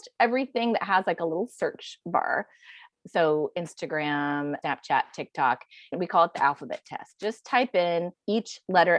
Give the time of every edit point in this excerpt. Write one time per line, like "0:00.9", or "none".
0:02.8
0:04.6
0:05.9
0:08.2